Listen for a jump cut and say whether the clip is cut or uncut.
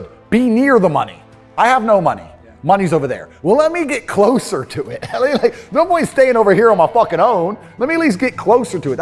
uncut